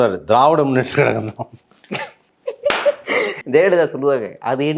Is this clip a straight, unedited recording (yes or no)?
no